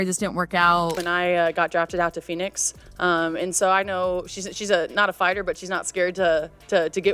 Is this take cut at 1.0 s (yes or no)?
yes